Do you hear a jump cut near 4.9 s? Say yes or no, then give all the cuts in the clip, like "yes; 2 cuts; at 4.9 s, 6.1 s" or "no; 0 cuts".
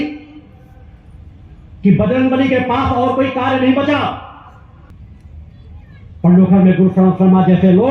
yes; 1 cut; at 4.9 s